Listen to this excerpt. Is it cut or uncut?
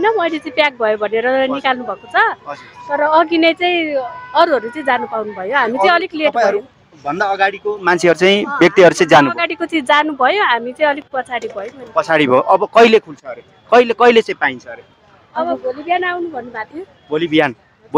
uncut